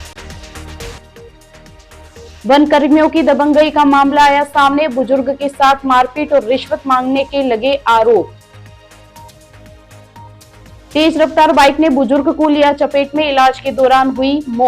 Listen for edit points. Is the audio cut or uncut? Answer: cut